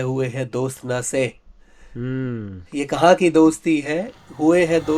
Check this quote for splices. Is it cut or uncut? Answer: uncut